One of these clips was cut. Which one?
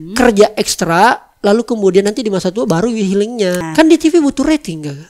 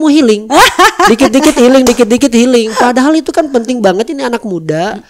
first; 1 cut; at 3.6 s

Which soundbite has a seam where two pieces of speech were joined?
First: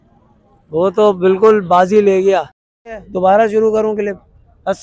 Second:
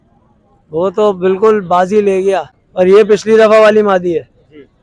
first; 1 cut; at 2.6 s

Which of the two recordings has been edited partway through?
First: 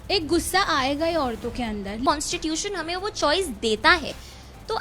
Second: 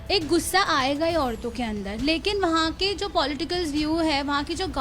first; 1 cut; at 2.0 s

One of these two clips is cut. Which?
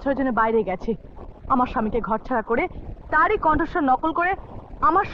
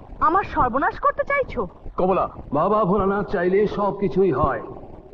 second; 1 cut; at 2.4 s

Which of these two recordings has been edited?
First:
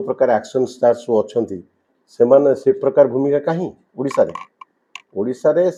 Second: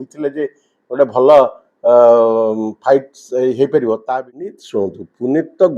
second; 1 cut; at 4.6 s

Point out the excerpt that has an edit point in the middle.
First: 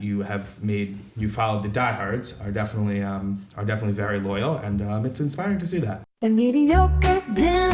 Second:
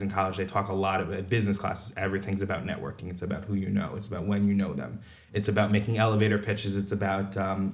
first; 1 cut; at 6.0 s

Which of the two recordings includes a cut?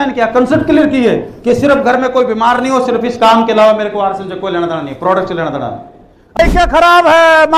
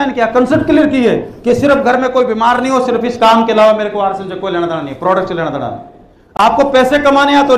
first; 1 cut; at 6.4 s

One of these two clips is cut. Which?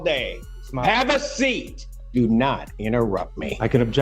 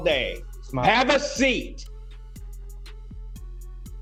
first; 1 cut; at 2.0 s

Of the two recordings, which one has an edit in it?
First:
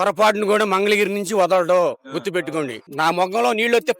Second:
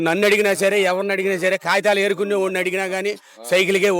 first; 1 cut; at 2.8 s

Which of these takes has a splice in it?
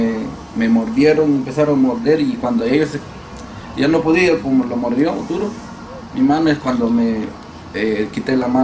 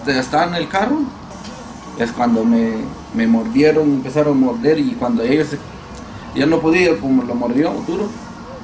second; 1 cut; at 1.3 s

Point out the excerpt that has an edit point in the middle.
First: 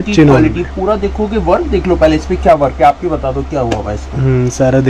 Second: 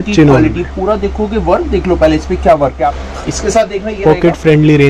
second; 1 cut; at 3.0 s

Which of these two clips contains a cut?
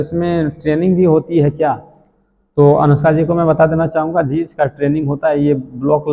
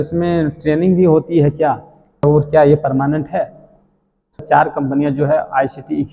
second; 2 cuts; at 2.2 s, 4.4 s

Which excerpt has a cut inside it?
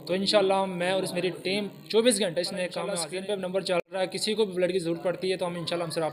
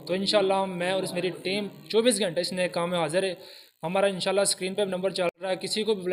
first; 1 cut; at 3.0 s

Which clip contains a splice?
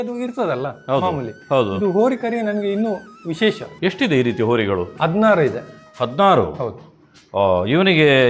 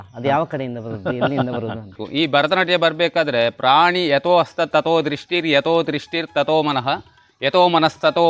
second; 1 cut; at 2.0 s

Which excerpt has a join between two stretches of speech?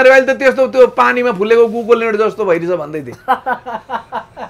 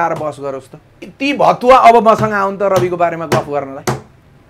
second; 1 cut; at 1.1 s

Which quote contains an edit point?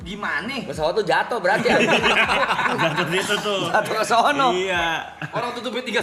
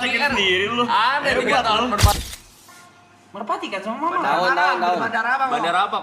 second; 1 cut; at 2.1 s

